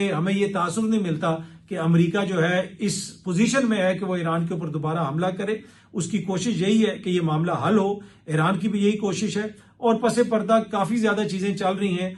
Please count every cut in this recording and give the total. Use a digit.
0